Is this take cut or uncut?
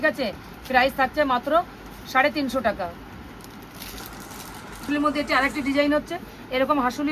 uncut